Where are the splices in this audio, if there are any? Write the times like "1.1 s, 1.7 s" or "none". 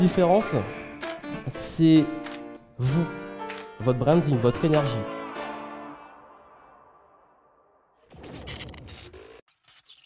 none